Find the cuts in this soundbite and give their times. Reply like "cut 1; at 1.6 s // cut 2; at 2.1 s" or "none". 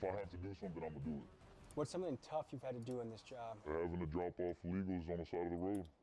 none